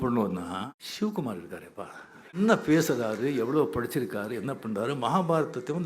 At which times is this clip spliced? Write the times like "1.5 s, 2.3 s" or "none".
1.0 s, 2.4 s